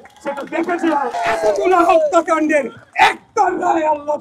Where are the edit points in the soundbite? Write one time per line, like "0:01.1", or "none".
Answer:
0:01.2